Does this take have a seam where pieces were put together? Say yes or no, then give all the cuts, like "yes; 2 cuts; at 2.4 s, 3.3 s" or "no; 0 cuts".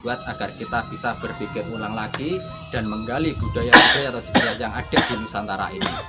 no; 0 cuts